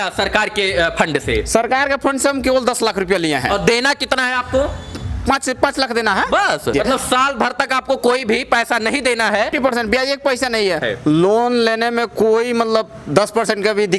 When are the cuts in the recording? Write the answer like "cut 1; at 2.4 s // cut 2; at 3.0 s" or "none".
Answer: cut 1; at 6.7 s // cut 2; at 9.5 s // cut 3; at 10.8 s

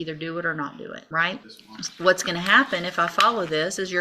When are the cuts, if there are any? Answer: cut 1; at 1.0 s // cut 2; at 1.6 s

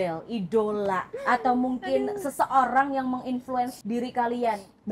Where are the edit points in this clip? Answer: cut 1; at 1.1 s // cut 2; at 3.8 s

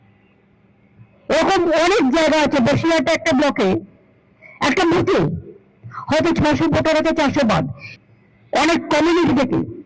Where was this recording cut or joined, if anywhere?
cut 1; at 7.8 s

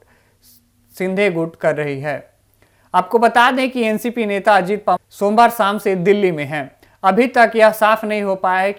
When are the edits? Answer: none

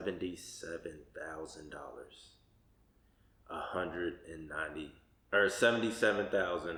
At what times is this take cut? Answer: none

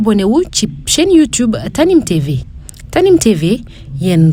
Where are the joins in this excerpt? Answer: none

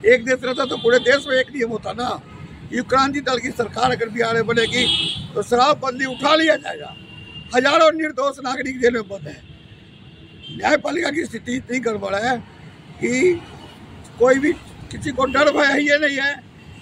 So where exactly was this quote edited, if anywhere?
none

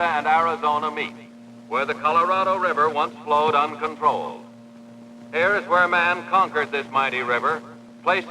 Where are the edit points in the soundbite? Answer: cut 1; at 3.0 s

